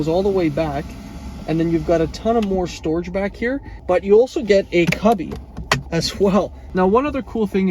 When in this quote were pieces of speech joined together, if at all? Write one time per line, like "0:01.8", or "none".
0:03.7
0:06.6